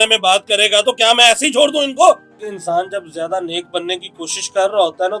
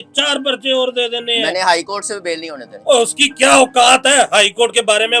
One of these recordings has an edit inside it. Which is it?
first; 1 cut; at 2.3 s

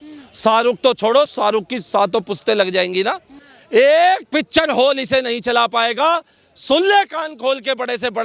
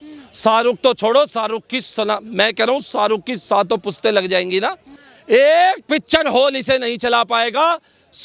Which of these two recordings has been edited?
first; 1 cut; at 1.3 s

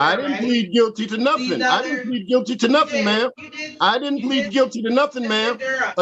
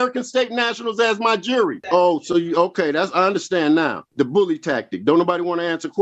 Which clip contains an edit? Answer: second; 2 cuts; at 1.8 s, 4.0 s

